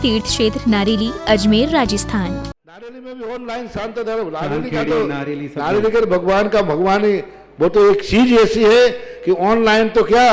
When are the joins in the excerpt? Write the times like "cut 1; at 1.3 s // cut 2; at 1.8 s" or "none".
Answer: cut 1; at 2.4 s